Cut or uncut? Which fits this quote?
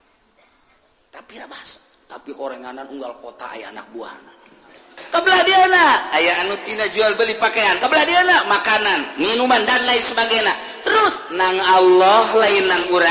cut